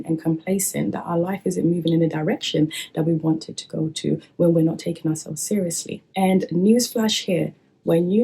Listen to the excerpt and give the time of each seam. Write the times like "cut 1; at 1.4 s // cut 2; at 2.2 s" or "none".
cut 1; at 6.0 s